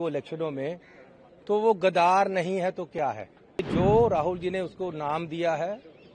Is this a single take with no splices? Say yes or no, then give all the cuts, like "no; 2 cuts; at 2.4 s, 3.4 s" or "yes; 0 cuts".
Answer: no; 1 cut; at 3.7 s